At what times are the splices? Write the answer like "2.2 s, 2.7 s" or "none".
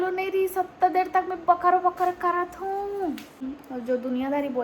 3.4 s